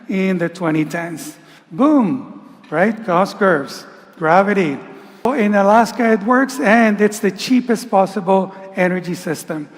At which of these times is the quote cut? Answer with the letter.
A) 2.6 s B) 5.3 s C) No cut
B